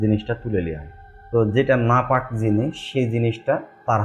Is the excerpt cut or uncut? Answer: uncut